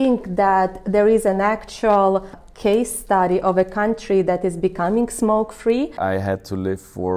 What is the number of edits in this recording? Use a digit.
2